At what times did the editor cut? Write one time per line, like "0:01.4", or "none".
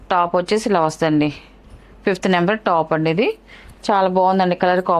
none